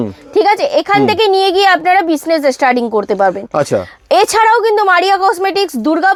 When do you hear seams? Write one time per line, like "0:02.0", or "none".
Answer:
none